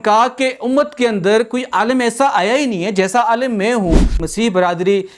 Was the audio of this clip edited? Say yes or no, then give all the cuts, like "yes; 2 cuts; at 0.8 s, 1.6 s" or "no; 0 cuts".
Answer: yes; 1 cut; at 4.1 s